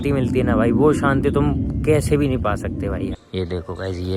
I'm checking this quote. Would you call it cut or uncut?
cut